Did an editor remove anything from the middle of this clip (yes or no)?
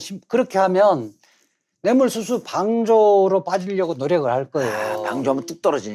no